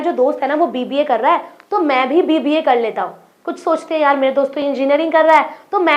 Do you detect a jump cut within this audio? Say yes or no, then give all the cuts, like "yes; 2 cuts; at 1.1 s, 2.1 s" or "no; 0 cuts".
no; 0 cuts